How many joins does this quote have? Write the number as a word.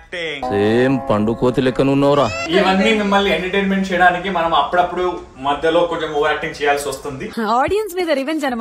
one